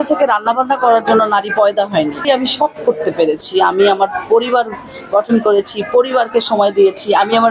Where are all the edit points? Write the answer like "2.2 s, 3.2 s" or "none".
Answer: 2.2 s